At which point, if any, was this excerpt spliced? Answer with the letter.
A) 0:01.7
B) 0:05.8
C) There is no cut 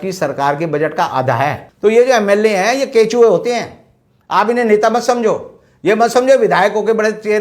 A